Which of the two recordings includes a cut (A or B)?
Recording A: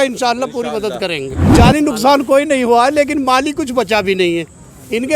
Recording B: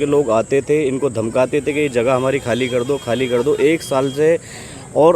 A